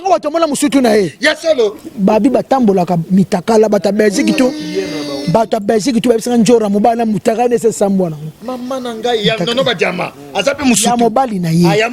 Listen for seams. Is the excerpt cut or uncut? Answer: uncut